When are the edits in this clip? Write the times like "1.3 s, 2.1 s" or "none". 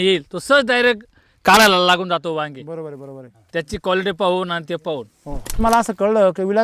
5.6 s